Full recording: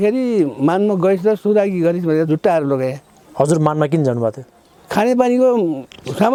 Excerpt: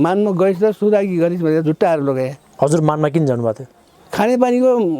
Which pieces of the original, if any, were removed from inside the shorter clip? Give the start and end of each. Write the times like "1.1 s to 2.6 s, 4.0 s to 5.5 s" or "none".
3.0 s to 3.2 s